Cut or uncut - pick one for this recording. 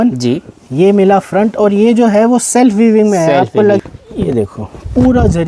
cut